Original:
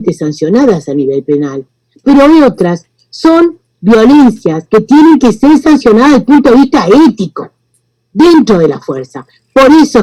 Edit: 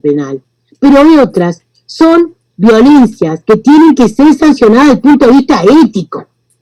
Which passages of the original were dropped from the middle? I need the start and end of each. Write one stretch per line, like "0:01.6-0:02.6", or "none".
none